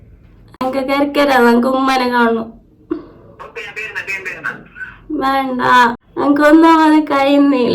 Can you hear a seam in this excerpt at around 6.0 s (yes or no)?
yes